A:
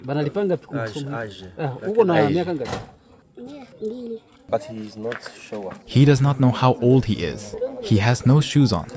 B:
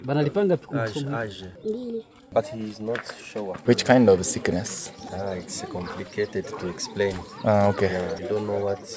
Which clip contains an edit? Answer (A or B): B